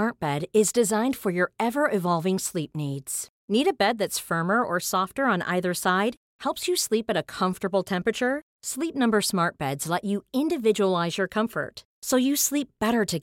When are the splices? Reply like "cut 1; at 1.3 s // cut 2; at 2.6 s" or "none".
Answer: none